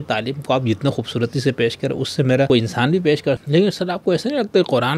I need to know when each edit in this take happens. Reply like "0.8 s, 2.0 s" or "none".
2.5 s, 3.4 s